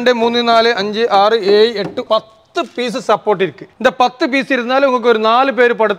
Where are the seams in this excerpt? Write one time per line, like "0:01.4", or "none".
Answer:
0:02.0